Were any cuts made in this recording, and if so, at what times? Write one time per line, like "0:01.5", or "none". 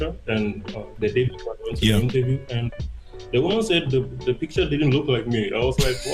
0:00.9